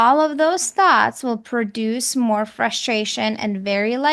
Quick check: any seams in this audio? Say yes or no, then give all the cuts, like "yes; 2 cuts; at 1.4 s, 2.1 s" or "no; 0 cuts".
no; 0 cuts